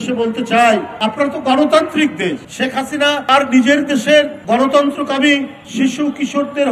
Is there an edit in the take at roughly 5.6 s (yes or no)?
yes